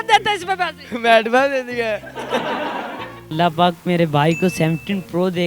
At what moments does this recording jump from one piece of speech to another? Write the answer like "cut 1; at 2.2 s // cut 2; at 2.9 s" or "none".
cut 1; at 3.1 s

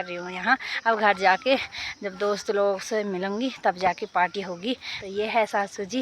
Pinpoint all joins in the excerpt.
cut 1; at 4.9 s

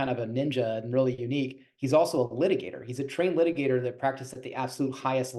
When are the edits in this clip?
none

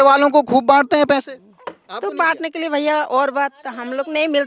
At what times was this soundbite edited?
none

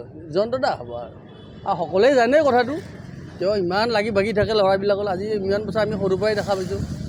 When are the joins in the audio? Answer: none

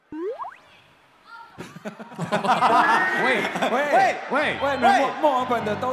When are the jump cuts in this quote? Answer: none

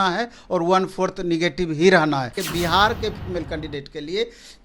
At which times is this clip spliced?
cut 1; at 2.4 s

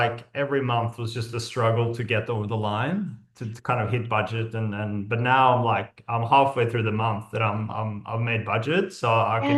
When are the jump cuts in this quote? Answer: none

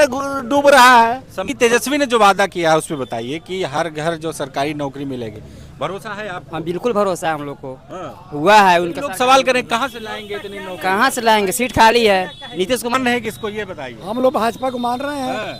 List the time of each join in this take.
cut 1; at 1.4 s // cut 2; at 12.9 s

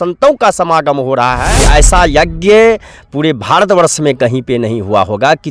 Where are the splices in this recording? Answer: cut 1; at 1.4 s

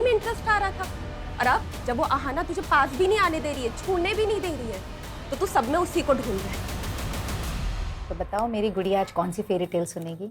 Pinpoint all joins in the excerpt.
cut 1; at 7.9 s

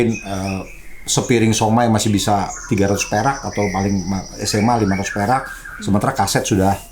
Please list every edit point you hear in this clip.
none

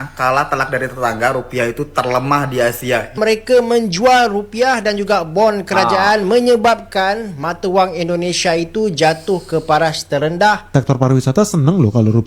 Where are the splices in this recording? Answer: cut 1; at 3.2 s // cut 2; at 10.6 s

